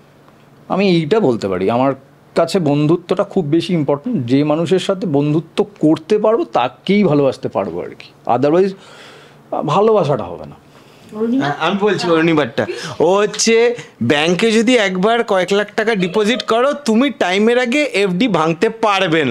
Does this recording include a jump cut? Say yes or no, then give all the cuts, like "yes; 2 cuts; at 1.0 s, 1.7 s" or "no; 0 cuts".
no; 0 cuts